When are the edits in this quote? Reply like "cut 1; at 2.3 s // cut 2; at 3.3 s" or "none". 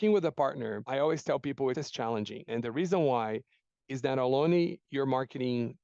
none